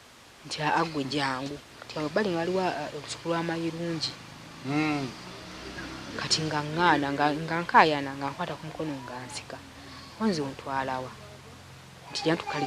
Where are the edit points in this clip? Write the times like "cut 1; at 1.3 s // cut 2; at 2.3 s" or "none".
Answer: cut 1; at 1.7 s

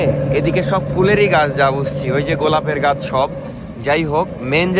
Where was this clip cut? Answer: none

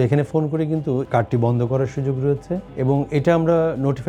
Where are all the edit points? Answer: cut 1; at 1.1 s // cut 2; at 2.7 s

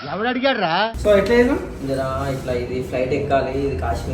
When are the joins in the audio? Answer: cut 1; at 0.9 s

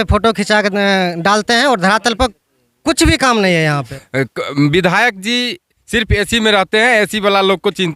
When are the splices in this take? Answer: cut 1; at 3.9 s

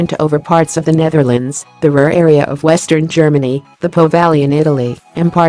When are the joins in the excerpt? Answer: none

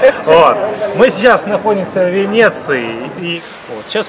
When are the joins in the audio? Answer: cut 1; at 3.2 s

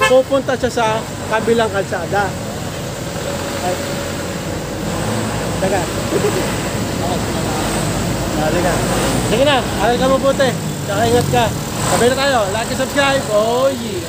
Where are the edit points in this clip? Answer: none

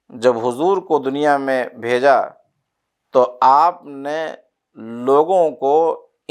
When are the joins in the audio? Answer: none

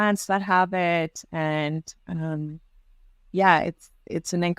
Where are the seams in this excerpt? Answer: none

